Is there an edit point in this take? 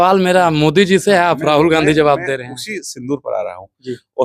no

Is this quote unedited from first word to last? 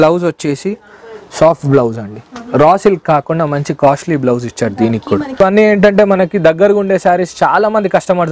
no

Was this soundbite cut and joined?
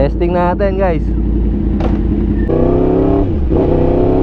yes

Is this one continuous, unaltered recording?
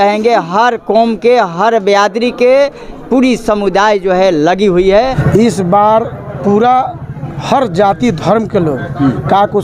no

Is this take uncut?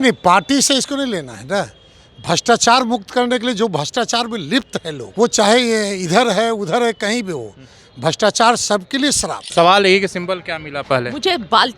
no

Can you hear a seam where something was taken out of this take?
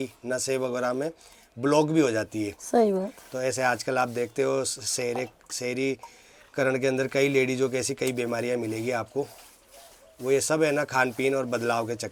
no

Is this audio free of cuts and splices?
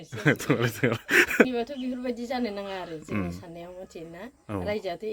no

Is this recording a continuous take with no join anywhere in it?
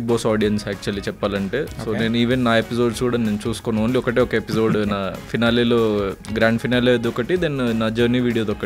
yes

